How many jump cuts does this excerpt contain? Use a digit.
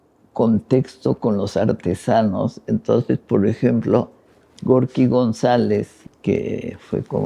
1